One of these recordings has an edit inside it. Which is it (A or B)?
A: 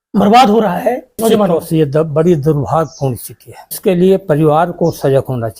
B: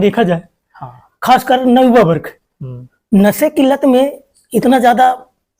A